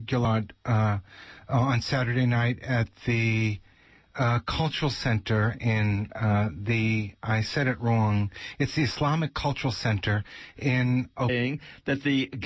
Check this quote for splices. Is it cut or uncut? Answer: uncut